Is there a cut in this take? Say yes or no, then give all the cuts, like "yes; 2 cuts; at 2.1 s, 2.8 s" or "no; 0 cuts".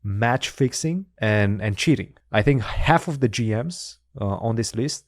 yes; 2 cuts; at 1.1 s, 2.1 s